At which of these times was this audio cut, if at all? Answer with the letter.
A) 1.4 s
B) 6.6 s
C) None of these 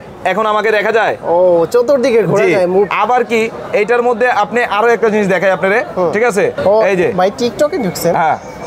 B